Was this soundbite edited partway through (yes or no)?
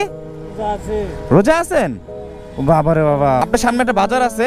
yes